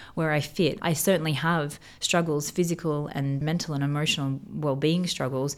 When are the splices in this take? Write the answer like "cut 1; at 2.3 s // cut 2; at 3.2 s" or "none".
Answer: cut 1; at 0.8 s // cut 2; at 3.4 s